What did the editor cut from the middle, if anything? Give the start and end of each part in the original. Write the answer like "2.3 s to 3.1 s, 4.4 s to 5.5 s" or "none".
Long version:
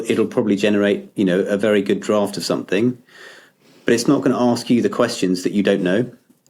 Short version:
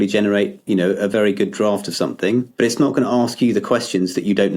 3.0 s to 3.8 s